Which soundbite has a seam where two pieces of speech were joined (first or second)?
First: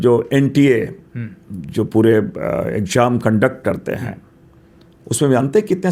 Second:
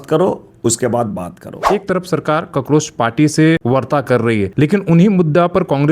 second